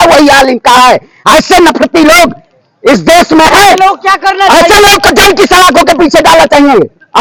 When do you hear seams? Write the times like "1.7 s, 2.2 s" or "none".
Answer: none